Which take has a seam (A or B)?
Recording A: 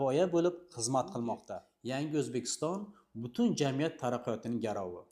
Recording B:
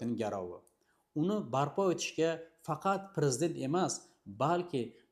A